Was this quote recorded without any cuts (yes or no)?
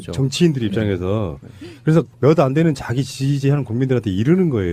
yes